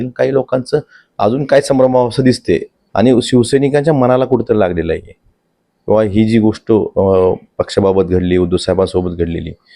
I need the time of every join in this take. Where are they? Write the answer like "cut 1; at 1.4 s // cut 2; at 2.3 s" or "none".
cut 1; at 2.8 s

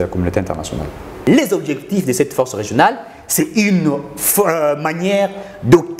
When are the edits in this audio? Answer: cut 1; at 1.3 s

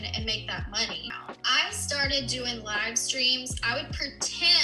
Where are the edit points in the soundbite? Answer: cut 1; at 1.1 s

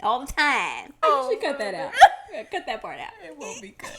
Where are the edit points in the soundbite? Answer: cut 1; at 1.0 s

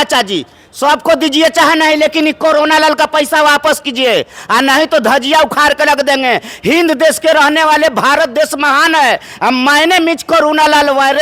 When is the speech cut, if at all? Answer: none

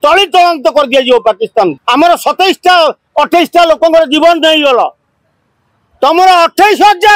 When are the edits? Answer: cut 1; at 1.8 s

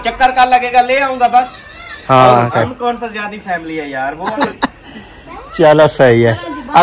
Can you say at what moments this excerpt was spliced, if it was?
cut 1; at 2.5 s // cut 2; at 4.3 s

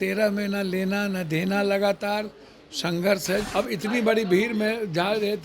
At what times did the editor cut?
cut 1; at 3.5 s

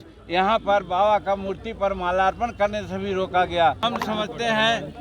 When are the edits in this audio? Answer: cut 1; at 3.8 s

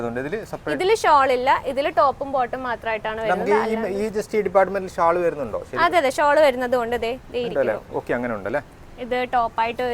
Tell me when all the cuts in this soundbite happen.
none

